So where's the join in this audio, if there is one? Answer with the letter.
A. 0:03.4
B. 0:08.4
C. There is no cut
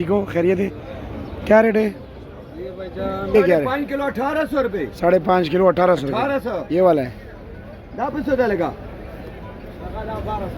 A